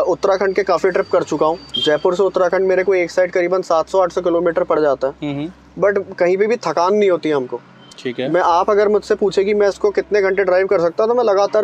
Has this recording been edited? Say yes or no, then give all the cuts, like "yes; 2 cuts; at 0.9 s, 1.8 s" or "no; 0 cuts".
yes; 1 cut; at 1.7 s